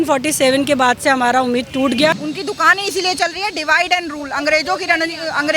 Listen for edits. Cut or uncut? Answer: cut